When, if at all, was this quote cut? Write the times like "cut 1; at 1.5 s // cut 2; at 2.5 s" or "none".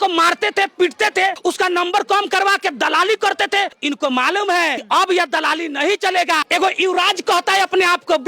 cut 1; at 3.8 s // cut 2; at 4.8 s // cut 3; at 6.4 s